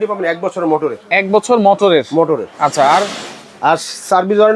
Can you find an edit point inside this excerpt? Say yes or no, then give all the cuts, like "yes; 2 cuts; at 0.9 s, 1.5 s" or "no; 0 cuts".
no; 0 cuts